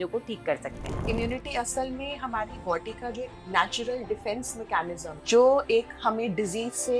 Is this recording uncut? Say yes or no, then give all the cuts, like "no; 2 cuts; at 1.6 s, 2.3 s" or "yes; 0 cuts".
no; 2 cuts; at 1.1 s, 5.1 s